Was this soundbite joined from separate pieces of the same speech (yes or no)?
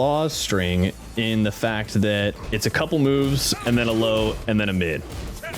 yes